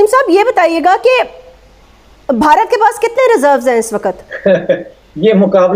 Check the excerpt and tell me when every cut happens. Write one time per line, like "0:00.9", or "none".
0:04.3